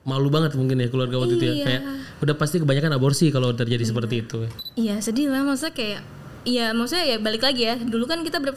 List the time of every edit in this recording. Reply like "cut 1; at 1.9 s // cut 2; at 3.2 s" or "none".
cut 1; at 4.5 s